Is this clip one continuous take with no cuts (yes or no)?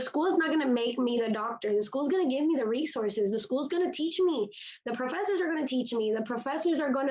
yes